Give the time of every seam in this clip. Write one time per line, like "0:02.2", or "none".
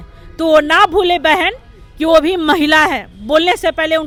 none